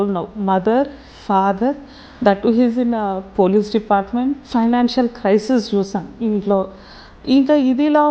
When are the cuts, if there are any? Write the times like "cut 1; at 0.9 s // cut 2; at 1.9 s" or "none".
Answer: cut 1; at 4.4 s